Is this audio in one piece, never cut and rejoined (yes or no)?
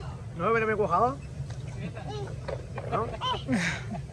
yes